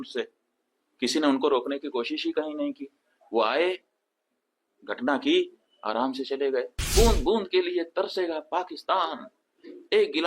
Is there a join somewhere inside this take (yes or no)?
yes